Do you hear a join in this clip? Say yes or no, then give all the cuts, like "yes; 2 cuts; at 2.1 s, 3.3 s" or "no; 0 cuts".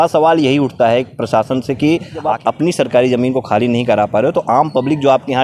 yes; 1 cut; at 2.5 s